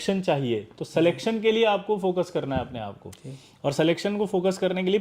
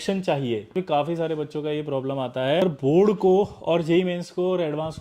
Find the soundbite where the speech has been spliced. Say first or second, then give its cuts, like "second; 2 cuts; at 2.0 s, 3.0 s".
second; 2 cuts; at 0.7 s, 2.6 s